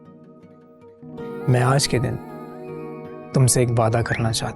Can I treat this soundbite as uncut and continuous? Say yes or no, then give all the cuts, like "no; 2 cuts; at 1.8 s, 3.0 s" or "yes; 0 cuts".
no; 1 cut; at 1.5 s